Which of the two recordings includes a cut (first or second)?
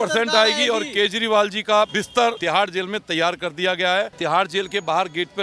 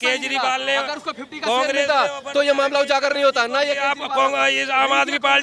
first